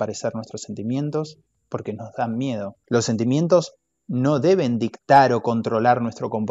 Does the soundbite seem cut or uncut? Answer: cut